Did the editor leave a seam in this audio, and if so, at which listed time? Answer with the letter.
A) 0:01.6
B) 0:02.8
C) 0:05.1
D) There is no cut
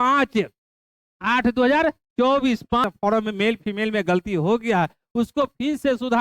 B